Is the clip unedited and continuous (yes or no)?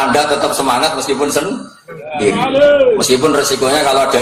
yes